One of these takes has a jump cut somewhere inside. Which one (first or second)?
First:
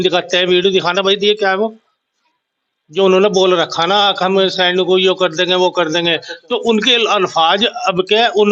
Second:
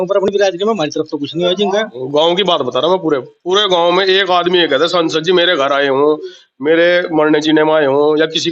second